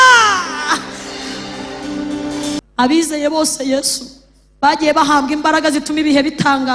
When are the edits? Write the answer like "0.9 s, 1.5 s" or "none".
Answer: 2.6 s